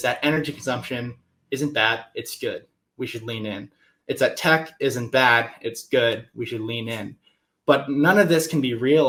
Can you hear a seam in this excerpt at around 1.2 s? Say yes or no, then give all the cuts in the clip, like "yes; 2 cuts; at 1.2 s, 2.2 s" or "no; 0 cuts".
no; 0 cuts